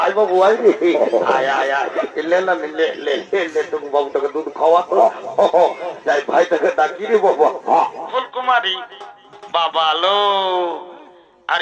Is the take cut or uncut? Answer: cut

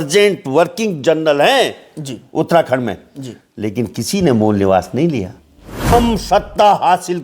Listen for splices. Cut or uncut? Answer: cut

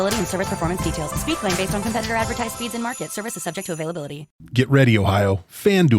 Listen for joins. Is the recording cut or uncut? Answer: cut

